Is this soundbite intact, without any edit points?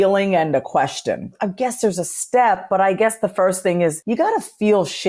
no; 2 cuts; at 1.3 s, 4.0 s

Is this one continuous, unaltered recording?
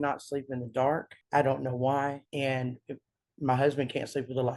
no; 2 cuts; at 1.2 s, 2.2 s

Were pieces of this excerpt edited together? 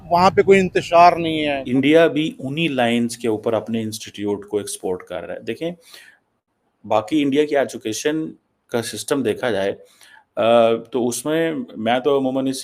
yes; 1 cut; at 1.6 s

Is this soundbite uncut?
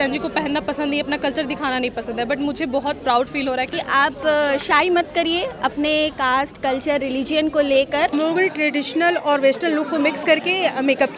no; 2 cuts; at 3.7 s, 8.1 s

